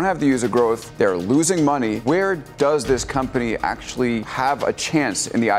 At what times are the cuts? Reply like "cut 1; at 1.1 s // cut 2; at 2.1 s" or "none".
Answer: cut 1; at 0.9 s // cut 2; at 2.0 s // cut 3; at 4.3 s